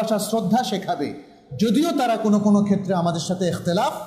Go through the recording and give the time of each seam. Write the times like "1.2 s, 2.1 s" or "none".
none